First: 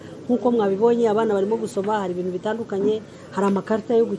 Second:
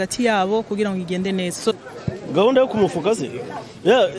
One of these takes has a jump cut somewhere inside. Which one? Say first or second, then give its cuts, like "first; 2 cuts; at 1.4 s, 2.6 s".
second; 1 cut; at 1.8 s